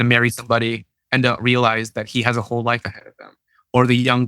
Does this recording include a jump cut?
yes; 1 cut; at 0.9 s

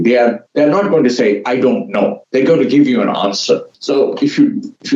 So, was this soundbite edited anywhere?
yes; 1 cut; at 3.7 s

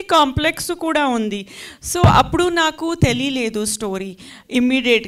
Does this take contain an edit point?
no; 0 cuts

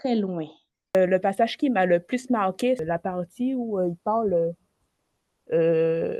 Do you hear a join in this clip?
yes; 2 cuts; at 0.9 s, 2.8 s

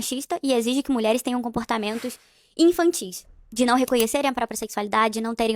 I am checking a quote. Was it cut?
yes; 1 cut; at 3.4 s

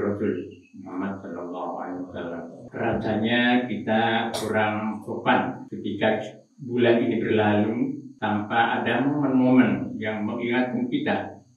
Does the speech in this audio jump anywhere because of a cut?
yes; 3 cuts; at 2.6 s, 5.7 s, 8.1 s

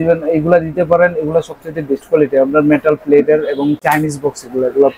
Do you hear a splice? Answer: no; 0 cuts

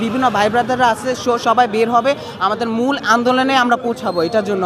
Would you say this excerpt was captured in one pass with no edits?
yes; 0 cuts

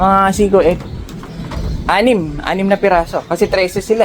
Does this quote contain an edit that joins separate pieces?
no; 0 cuts

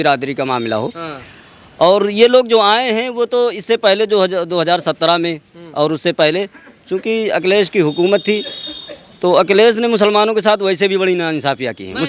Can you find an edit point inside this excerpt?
no; 0 cuts

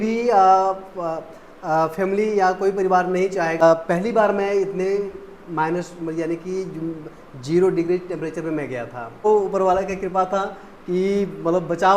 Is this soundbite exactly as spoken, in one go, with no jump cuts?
no; 2 cuts; at 3.6 s, 9.2 s

